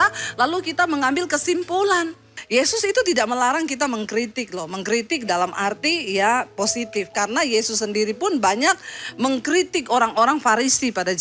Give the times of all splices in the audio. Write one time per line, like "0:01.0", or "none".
0:02.3